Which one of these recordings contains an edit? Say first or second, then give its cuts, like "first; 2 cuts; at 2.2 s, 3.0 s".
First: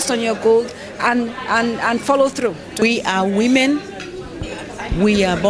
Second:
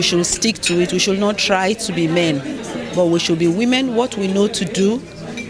first; 1 cut; at 2.8 s